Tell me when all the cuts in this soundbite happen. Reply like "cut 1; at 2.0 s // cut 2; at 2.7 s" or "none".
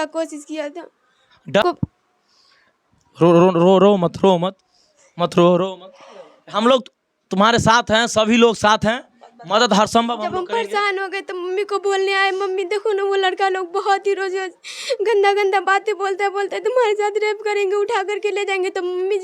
cut 1; at 1.6 s